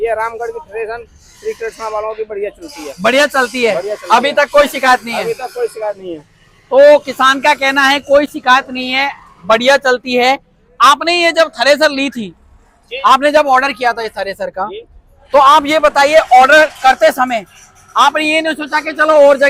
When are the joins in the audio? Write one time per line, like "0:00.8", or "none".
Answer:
none